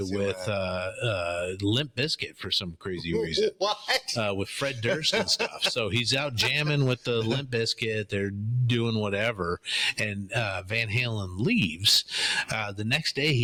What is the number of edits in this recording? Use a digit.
0